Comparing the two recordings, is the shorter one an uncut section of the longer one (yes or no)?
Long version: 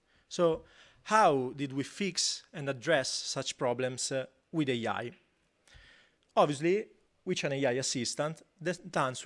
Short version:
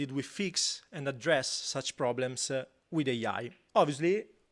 no